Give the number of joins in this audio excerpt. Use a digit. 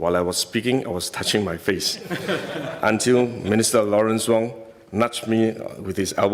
0